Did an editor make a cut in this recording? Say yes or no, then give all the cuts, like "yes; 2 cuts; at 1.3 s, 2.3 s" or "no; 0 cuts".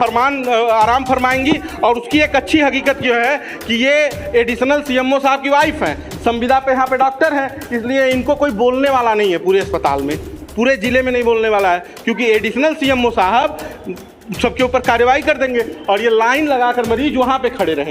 no; 0 cuts